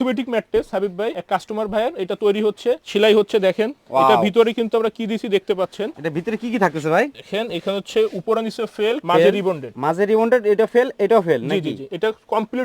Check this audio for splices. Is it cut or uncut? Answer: uncut